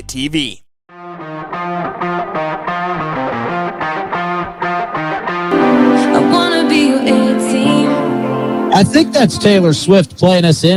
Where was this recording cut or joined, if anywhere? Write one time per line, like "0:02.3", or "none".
none